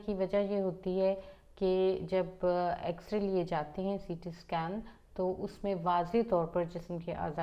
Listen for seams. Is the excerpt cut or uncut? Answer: uncut